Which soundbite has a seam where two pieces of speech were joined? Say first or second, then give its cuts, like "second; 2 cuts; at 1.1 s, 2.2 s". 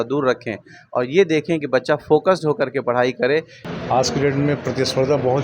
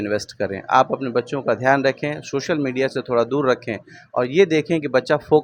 first; 1 cut; at 3.6 s